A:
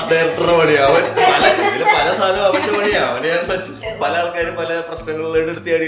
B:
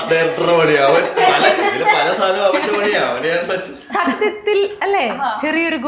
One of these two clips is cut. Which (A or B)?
A